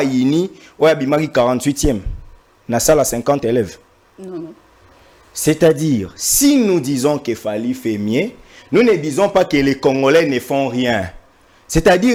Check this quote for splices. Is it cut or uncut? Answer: uncut